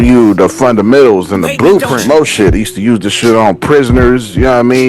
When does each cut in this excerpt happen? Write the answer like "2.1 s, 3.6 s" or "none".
1.9 s